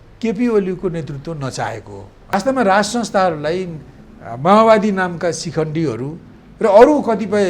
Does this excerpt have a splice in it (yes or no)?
yes